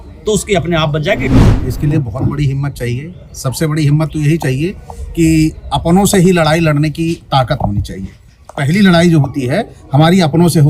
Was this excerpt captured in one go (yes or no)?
no